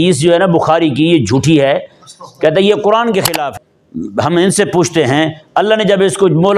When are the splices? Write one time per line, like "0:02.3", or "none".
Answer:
0:03.5